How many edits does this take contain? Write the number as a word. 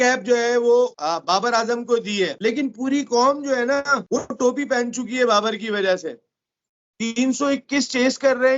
three